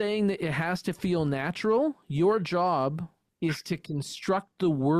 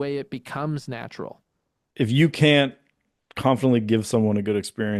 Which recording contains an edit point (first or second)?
second